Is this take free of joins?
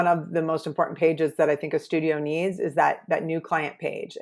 yes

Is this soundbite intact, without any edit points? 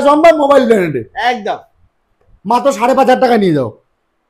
yes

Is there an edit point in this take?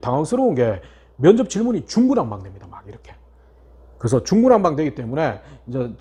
no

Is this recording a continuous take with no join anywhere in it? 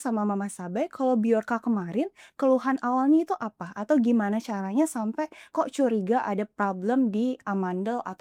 yes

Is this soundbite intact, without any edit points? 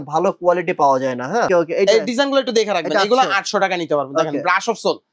no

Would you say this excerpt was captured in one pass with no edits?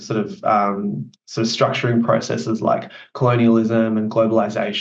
yes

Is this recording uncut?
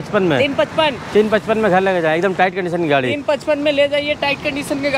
yes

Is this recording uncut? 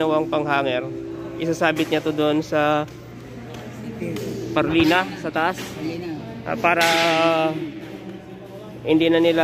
yes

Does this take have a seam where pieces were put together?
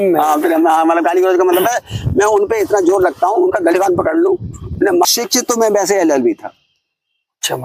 yes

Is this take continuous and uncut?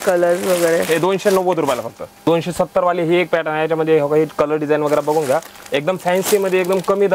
no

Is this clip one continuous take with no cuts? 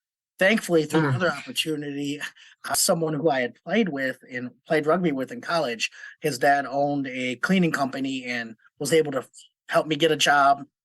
no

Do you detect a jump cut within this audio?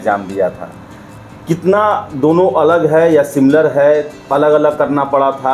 no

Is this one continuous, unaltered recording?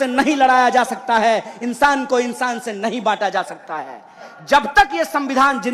no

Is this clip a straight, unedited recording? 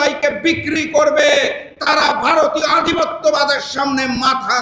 yes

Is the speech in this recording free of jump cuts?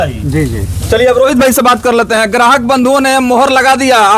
yes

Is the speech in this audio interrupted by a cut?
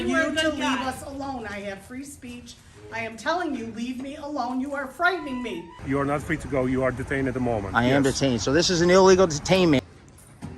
yes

